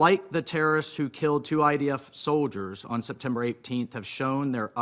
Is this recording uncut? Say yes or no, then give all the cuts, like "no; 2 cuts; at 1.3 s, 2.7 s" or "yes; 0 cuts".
yes; 0 cuts